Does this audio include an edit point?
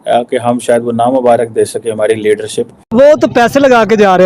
yes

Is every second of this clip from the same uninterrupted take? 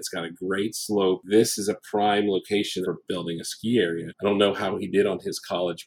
no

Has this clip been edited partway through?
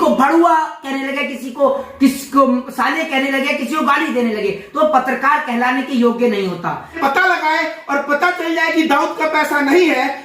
yes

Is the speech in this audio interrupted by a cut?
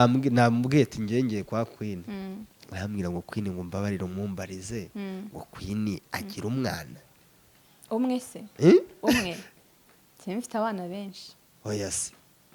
no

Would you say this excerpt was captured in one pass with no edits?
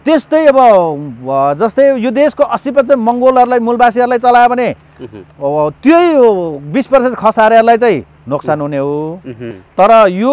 no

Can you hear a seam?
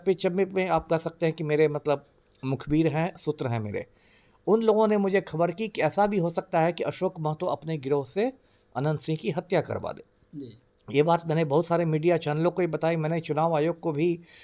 no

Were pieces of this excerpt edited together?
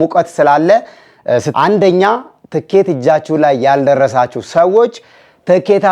yes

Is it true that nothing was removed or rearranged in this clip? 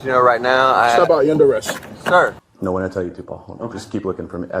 no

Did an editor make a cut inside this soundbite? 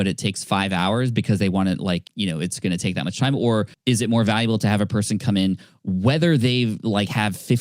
yes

